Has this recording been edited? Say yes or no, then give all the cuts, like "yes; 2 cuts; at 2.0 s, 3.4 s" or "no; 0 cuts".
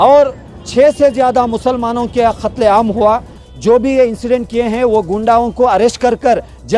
yes; 1 cut; at 3.4 s